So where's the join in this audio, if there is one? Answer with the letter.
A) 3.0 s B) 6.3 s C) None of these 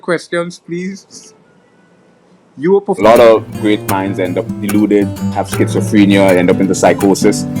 A